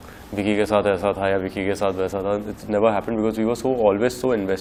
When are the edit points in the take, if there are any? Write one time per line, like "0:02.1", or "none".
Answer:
none